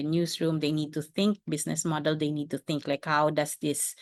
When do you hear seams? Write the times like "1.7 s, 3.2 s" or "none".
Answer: none